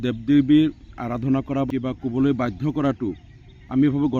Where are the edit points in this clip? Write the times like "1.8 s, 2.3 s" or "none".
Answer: 1.7 s

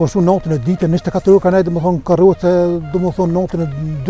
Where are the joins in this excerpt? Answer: none

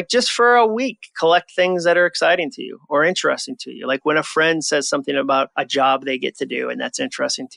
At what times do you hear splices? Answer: 5.5 s

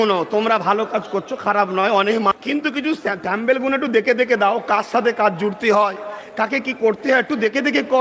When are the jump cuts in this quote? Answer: 2.3 s

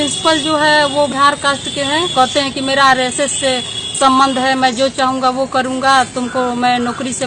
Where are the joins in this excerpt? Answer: 1.1 s

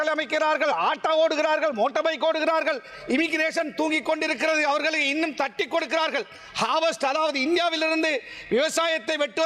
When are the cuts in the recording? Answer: none

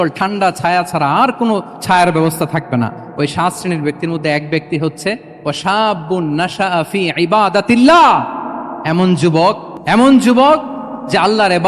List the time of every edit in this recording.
none

